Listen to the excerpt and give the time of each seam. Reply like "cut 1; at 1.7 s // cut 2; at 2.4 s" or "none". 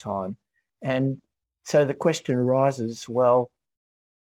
none